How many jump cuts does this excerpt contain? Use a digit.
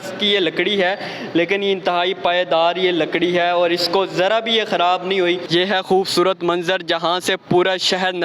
1